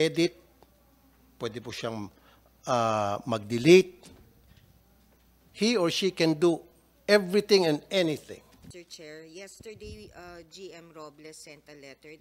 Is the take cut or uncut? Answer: cut